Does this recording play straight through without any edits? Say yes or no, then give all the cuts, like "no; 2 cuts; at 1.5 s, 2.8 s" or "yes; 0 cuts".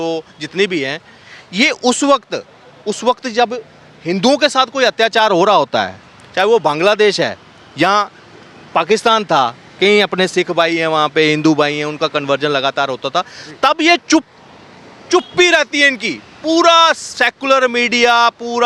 yes; 0 cuts